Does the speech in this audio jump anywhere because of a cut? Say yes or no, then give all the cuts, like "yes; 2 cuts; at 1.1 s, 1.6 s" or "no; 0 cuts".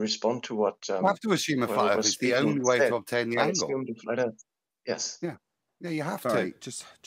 no; 0 cuts